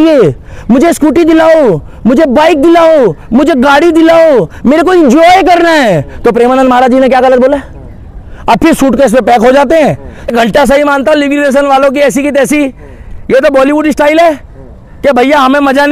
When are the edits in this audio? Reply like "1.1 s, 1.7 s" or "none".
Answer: 10.3 s